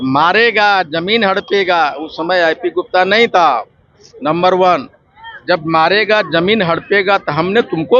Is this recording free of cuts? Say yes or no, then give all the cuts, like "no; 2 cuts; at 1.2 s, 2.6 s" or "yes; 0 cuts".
yes; 0 cuts